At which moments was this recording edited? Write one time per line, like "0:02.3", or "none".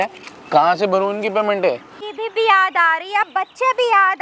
0:02.0